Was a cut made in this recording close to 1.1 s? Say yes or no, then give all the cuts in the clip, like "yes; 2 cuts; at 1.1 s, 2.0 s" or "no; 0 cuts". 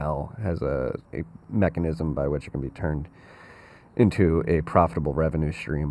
yes; 1 cut; at 1.1 s